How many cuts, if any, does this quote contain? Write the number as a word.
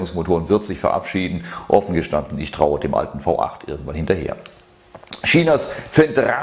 one